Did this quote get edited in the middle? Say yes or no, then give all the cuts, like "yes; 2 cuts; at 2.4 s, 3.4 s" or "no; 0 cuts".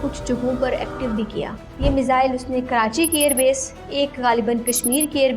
yes; 1 cut; at 1.6 s